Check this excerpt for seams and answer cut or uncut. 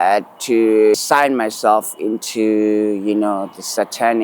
cut